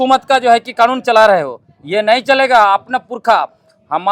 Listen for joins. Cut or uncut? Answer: uncut